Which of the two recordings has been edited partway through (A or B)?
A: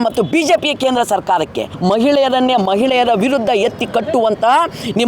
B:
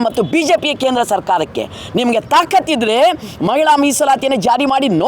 A